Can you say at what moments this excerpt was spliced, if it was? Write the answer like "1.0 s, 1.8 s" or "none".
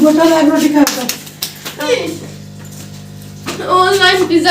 1.9 s

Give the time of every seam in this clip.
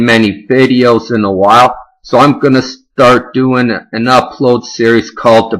2.9 s

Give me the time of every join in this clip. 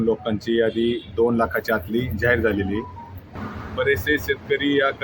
3.3 s

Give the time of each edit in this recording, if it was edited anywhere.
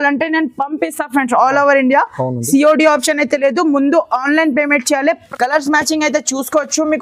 5.3 s

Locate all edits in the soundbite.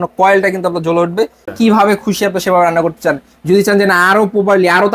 1.4 s

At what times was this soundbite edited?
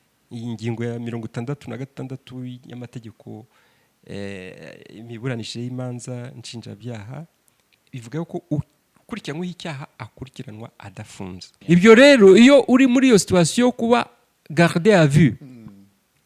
11.5 s

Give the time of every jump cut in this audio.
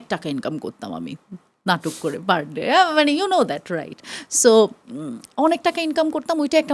none

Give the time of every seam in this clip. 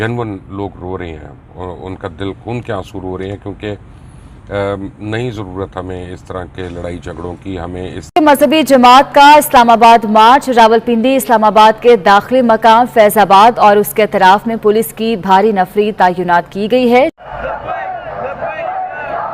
8.0 s, 17.3 s

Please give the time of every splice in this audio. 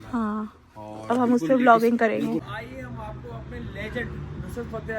2.4 s

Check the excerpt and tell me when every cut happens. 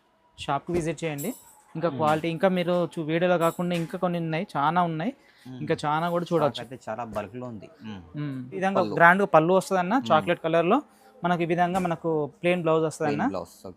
8.6 s

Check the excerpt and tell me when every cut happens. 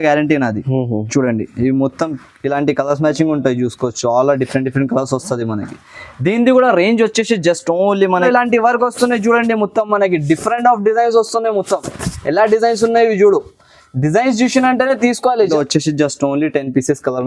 8.3 s, 15.5 s

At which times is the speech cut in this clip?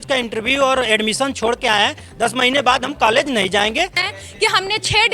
4.0 s

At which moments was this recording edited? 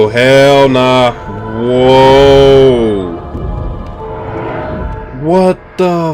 5.1 s

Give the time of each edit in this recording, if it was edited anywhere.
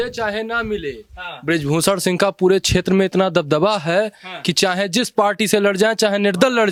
none

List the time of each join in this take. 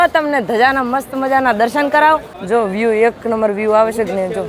2.3 s

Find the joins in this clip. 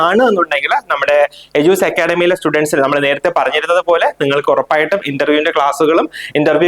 none

